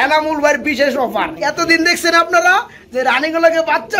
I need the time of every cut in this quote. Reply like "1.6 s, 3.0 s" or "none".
1.3 s